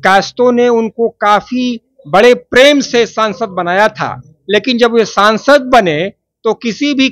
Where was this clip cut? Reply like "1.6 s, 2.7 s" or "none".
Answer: none

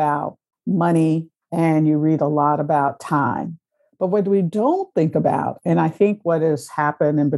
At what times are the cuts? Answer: 1.4 s

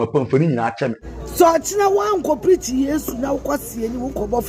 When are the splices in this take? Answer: 1.0 s

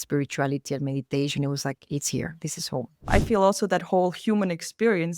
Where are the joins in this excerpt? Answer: 3.1 s

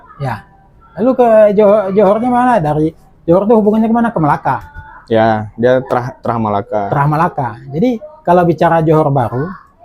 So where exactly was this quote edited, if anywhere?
none

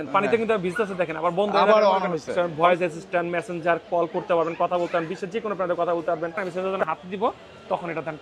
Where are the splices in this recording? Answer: 2.3 s, 6.4 s

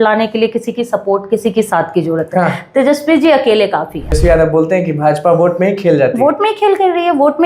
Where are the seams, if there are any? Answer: 4.2 s

